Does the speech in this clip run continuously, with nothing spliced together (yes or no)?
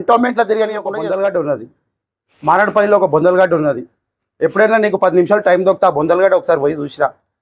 no